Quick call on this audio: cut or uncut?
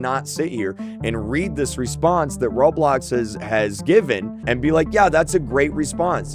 uncut